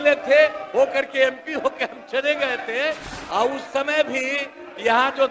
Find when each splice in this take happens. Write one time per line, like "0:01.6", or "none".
0:03.1